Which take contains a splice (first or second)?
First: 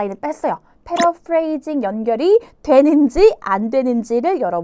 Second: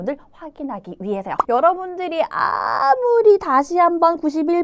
second